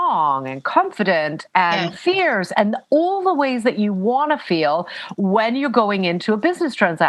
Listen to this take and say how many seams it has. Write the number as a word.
zero